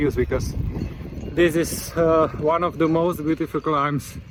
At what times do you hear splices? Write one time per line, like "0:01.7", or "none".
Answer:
none

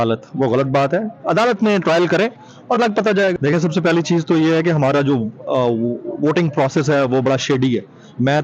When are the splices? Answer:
0:03.5

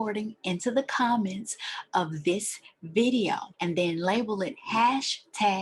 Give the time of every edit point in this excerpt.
0:03.5

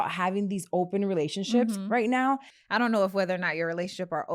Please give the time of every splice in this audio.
0:02.5

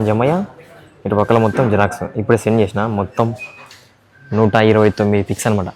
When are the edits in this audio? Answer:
none

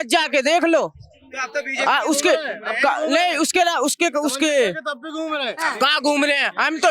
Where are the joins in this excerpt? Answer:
none

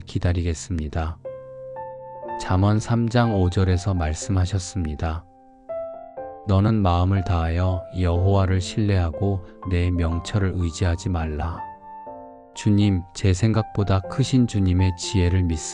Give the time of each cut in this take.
0:05.3
0:06.4

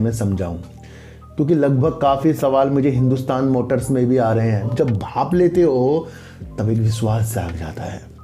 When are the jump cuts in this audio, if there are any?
0:04.7

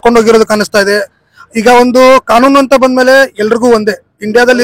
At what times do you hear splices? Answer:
none

